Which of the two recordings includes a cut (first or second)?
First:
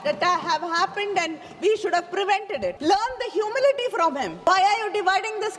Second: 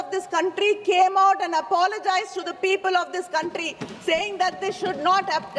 first